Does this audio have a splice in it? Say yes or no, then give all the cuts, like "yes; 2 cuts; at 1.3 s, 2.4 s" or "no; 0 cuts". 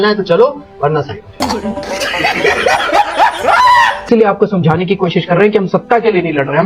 yes; 2 cuts; at 1.3 s, 4.0 s